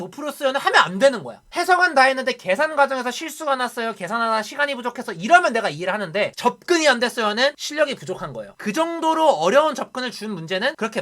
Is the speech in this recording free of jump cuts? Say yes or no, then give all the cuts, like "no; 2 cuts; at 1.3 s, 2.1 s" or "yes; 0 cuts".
no; 1 cut; at 8.5 s